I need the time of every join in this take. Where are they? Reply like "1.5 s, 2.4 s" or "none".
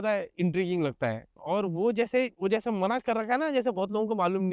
1.3 s, 2.3 s